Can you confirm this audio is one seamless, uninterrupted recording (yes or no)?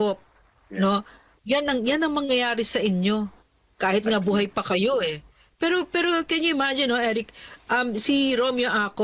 yes